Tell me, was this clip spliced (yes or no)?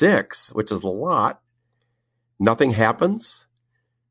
no